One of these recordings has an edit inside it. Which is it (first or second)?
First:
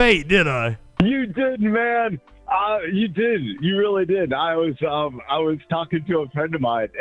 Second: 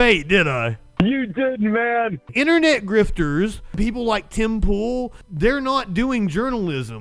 second